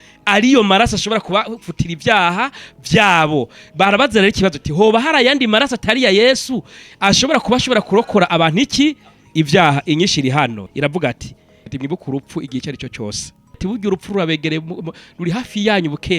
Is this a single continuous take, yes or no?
no